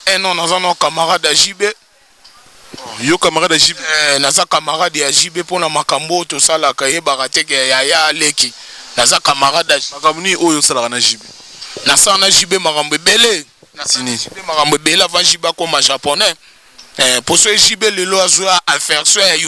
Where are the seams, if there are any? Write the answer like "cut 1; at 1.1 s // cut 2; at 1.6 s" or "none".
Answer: none